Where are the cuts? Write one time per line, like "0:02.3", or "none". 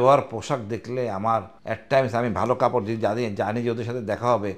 0:01.5